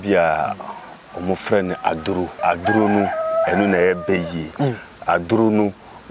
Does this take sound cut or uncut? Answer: cut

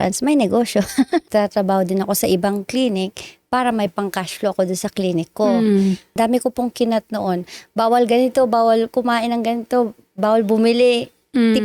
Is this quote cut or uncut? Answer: cut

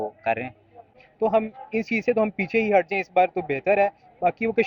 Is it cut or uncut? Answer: cut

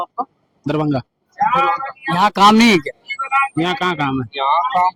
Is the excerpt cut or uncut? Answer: uncut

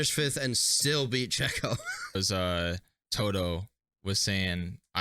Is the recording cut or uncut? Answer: cut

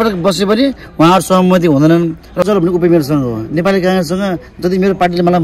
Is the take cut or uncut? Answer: cut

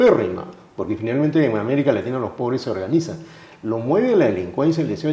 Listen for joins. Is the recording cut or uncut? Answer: uncut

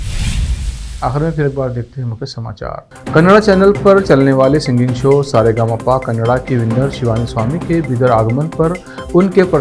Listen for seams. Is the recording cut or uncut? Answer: uncut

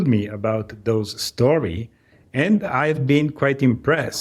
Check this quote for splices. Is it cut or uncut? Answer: uncut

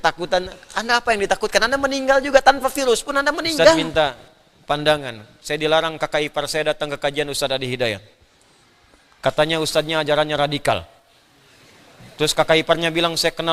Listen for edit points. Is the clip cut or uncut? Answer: cut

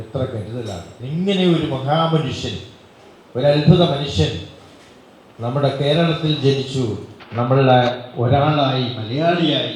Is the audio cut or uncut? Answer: cut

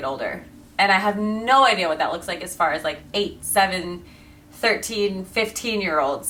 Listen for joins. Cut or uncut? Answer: uncut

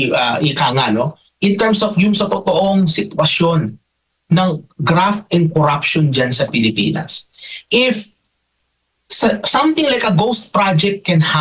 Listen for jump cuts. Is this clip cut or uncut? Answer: uncut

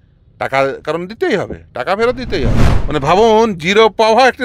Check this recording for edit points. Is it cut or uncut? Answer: cut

